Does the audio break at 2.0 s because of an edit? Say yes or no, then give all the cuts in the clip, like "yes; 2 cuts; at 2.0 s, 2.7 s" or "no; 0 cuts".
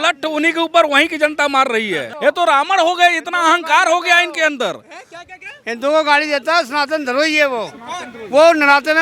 yes; 1 cut; at 2.0 s